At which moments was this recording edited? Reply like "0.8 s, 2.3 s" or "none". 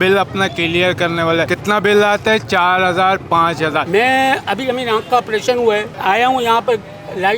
3.8 s, 5.9 s